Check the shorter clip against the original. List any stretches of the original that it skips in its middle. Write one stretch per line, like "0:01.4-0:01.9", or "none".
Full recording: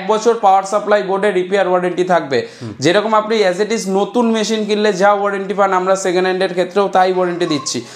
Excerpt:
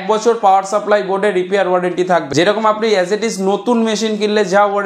0:02.3-0:02.7

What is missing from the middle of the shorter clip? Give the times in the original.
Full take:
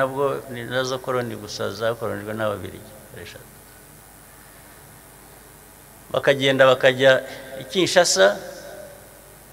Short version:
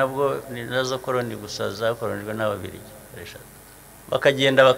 0:03.7-0:05.8

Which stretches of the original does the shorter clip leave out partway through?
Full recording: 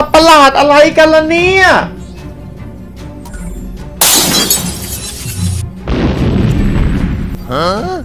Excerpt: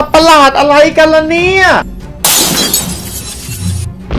0:01.8-0:03.6

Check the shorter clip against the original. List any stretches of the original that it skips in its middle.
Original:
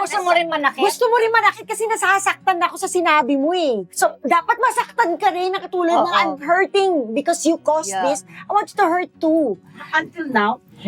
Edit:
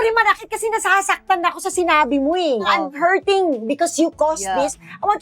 0:03.8-0:06.1

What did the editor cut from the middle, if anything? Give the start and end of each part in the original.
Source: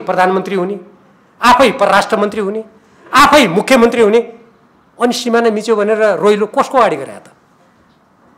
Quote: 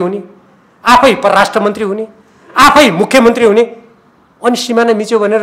none

